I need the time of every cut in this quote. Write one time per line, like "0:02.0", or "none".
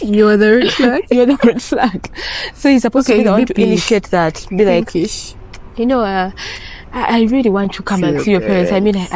none